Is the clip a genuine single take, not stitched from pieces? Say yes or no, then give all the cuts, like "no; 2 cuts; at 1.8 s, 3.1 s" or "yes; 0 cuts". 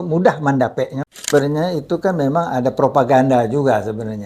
no; 1 cut; at 1.2 s